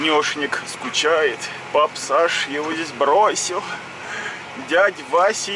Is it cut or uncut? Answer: cut